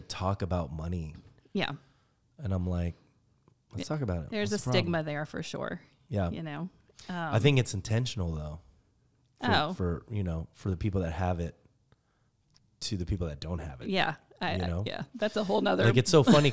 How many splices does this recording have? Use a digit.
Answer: 0